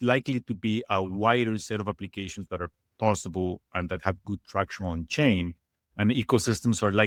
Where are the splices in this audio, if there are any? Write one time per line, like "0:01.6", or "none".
none